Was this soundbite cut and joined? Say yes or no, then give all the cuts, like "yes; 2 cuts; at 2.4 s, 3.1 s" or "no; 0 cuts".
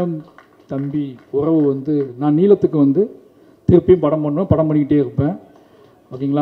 yes; 1 cut; at 2.1 s